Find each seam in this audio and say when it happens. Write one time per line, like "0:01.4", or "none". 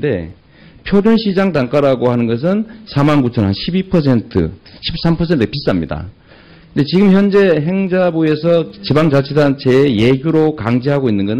0:09.6